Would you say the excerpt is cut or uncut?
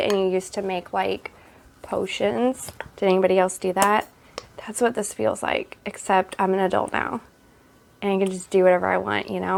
uncut